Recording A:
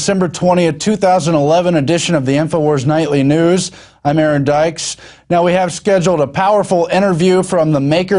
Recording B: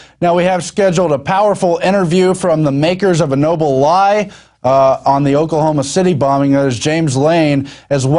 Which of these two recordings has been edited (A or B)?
B